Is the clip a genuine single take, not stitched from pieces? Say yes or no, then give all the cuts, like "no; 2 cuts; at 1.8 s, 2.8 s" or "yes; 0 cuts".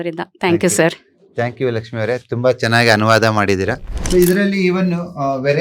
no; 1 cut; at 3.9 s